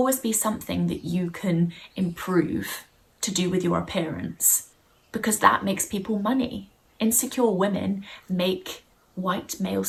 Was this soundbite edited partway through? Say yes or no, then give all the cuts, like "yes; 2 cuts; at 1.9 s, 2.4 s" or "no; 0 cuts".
no; 0 cuts